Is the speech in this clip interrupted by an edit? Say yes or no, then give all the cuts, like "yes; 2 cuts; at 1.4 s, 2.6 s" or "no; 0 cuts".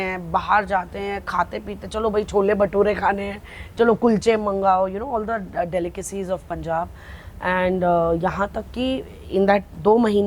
no; 0 cuts